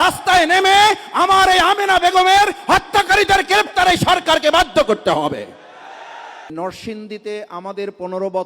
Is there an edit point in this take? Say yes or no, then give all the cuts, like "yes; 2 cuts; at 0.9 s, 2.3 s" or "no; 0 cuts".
yes; 1 cut; at 6.5 s